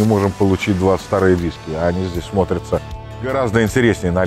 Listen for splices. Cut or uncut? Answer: uncut